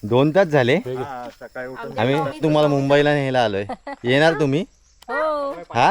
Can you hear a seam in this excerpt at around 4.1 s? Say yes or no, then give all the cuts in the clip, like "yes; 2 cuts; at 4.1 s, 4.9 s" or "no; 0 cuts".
no; 1 cut; at 2.4 s